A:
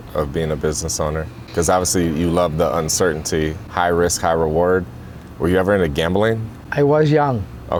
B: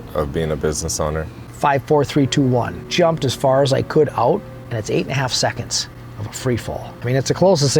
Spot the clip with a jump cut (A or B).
B